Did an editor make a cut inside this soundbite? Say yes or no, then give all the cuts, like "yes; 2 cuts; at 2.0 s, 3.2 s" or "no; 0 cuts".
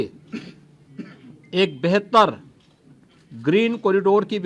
no; 0 cuts